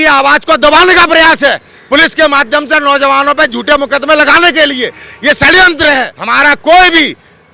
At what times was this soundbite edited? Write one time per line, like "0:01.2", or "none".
0:06.2